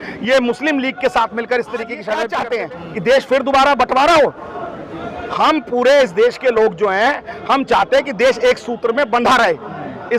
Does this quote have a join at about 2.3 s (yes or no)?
yes